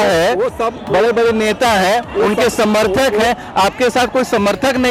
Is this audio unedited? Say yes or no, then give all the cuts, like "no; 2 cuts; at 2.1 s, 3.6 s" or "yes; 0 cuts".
yes; 0 cuts